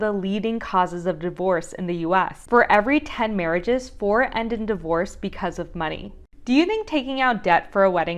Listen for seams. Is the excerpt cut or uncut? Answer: uncut